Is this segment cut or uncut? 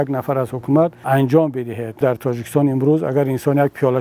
cut